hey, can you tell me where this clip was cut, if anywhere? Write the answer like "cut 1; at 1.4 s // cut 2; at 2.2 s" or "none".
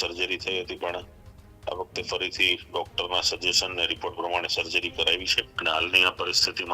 cut 1; at 5.4 s